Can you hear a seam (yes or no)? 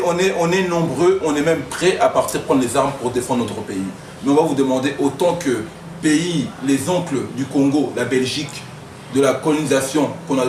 no